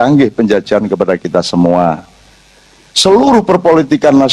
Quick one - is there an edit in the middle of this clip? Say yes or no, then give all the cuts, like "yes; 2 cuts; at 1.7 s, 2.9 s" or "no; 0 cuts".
no; 0 cuts